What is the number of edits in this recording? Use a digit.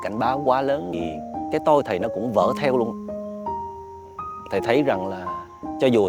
1